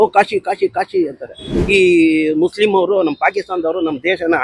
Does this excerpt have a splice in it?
yes; 1 cut; at 1.5 s

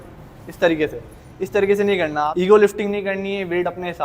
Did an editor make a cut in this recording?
yes; 1 cut; at 2.2 s

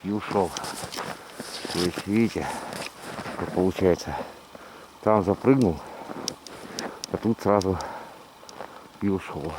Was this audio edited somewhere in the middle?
no; 0 cuts

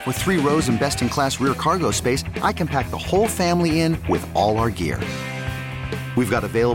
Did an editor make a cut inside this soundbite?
no; 0 cuts

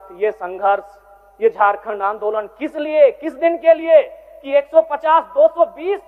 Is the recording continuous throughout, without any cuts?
yes; 0 cuts

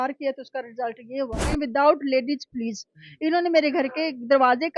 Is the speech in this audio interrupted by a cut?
yes; 1 cut; at 1.5 s

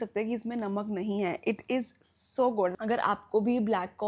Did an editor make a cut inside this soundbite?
yes; 1 cut; at 2.7 s

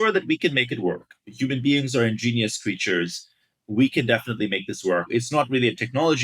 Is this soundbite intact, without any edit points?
no; 1 cut; at 5.1 s

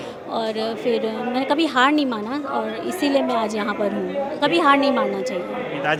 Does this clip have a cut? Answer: no; 0 cuts

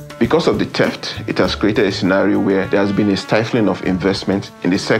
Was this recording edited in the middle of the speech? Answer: yes; 1 cut; at 2.7 s

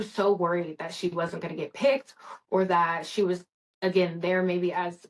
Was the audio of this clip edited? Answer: no; 0 cuts

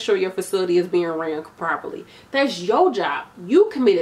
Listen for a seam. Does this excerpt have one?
no; 0 cuts

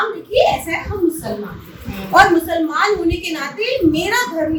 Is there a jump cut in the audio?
no; 0 cuts

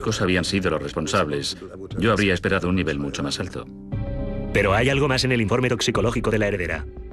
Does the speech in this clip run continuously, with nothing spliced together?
yes; 0 cuts

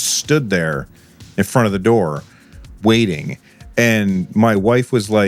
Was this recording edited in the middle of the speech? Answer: no; 0 cuts

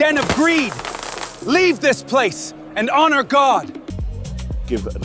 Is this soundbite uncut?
no; 1 cut; at 3.9 s

